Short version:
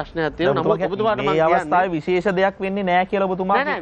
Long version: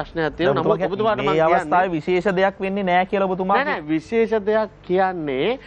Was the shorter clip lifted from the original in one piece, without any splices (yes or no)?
yes